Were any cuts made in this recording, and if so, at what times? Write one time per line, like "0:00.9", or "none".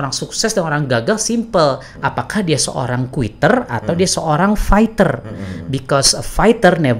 none